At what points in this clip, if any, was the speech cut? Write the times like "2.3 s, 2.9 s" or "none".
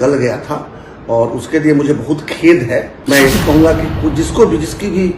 2.9 s

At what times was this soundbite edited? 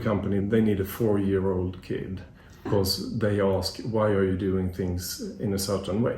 2.7 s

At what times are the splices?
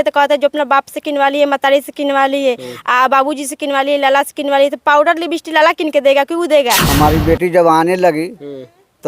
6.9 s

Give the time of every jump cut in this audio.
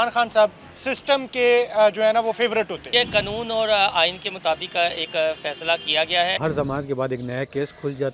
2.9 s, 6.4 s

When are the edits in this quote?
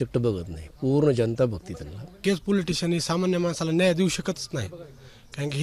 2.2 s

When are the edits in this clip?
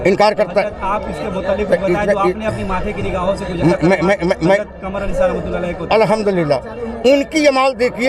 none

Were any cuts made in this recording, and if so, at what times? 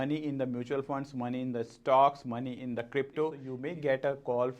3.5 s

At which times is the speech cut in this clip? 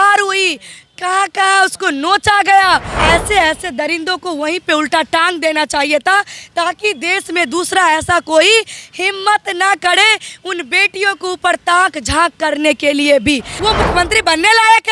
3.0 s, 13.5 s

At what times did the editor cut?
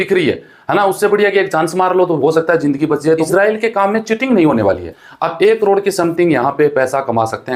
3.2 s, 4.9 s

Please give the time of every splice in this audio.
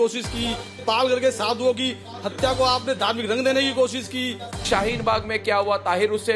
none

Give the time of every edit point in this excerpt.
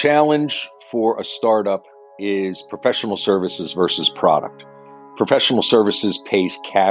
none

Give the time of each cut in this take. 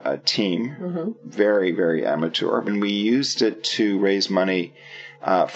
2.7 s

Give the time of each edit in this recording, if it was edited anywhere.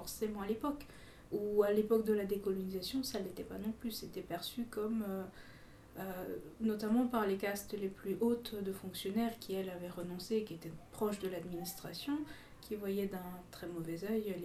none

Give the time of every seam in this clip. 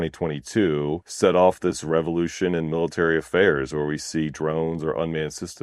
1.1 s

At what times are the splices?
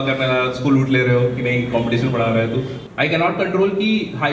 2.8 s

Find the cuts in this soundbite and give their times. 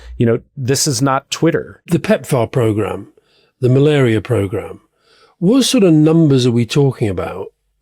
1.9 s

